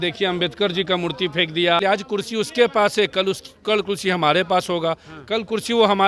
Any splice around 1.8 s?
yes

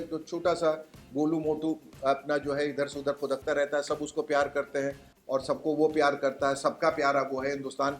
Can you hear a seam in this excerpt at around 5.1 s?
no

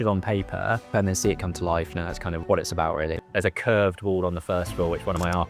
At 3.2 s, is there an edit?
yes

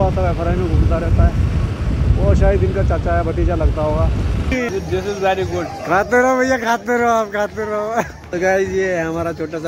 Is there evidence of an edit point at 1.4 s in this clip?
no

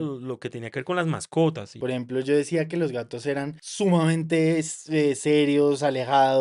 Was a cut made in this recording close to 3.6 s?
yes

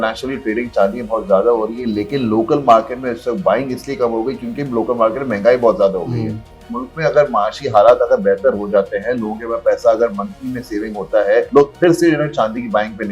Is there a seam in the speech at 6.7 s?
yes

